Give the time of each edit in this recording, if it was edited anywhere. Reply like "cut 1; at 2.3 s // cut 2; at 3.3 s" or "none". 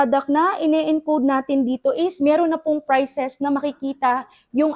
none